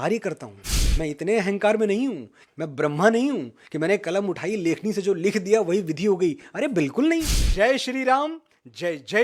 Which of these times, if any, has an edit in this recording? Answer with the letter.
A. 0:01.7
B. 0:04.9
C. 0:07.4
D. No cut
C